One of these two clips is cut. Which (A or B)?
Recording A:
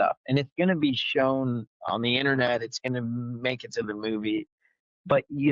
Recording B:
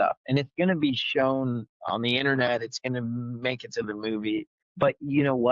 B